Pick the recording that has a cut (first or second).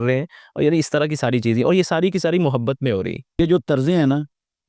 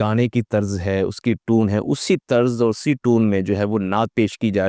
first